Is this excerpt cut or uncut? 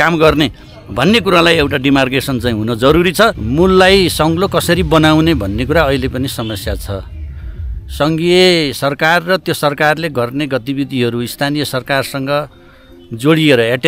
cut